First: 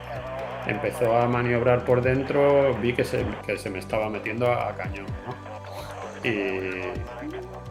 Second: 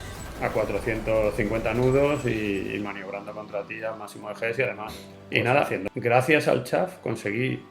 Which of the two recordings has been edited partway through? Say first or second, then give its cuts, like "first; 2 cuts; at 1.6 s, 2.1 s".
second; 1 cut; at 5.4 s